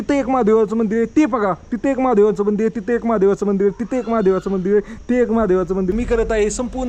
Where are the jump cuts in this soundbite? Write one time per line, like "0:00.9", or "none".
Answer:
0:05.9